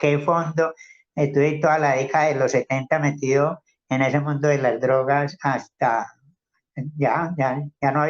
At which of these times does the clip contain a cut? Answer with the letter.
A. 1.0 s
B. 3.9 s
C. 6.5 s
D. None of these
D